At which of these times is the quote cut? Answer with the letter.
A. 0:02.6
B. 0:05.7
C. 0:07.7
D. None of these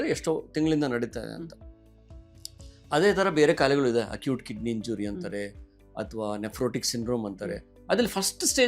C